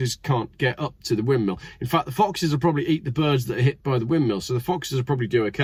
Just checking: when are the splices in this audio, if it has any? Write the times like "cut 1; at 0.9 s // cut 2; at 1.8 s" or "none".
none